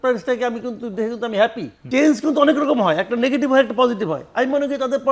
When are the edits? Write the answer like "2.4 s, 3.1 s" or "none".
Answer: 1.7 s